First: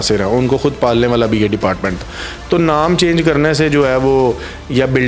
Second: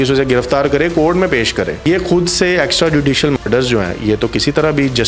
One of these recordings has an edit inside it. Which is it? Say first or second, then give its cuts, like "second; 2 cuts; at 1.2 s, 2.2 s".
second; 1 cut; at 1.8 s